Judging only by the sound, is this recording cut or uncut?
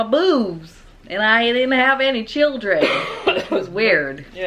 uncut